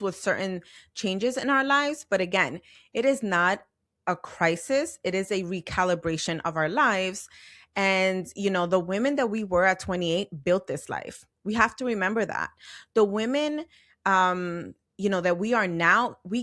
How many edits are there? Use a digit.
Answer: 0